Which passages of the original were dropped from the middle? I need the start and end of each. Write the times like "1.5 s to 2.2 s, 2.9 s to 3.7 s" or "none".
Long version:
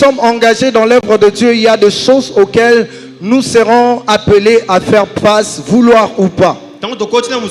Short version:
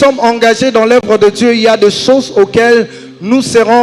none